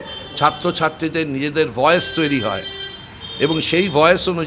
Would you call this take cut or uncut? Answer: uncut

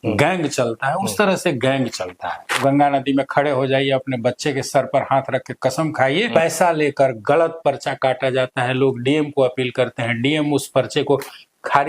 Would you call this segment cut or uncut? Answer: cut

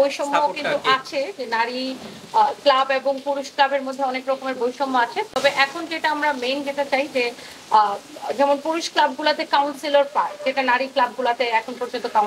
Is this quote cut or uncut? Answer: uncut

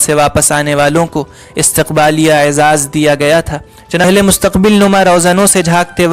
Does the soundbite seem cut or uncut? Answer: cut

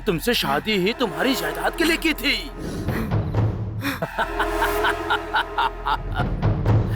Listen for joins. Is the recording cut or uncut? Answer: cut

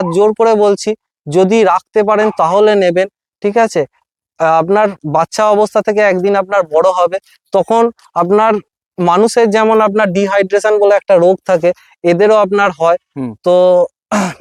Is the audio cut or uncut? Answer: uncut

